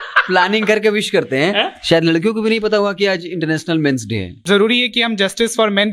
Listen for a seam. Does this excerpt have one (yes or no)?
yes